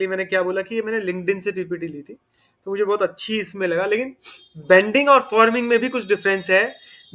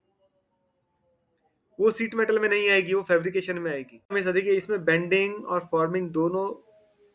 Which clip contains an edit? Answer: second; 1 cut; at 4.1 s

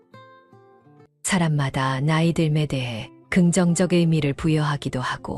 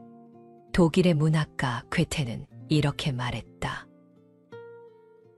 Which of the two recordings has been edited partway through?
first; 1 cut; at 1.1 s

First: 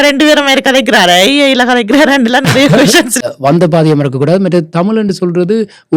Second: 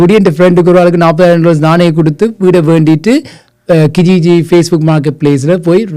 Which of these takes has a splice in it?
first; 1 cut; at 3.2 s

